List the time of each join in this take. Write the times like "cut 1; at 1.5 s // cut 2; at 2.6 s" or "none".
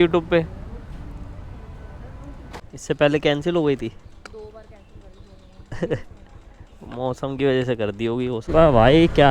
cut 1; at 2.6 s // cut 2; at 8.4 s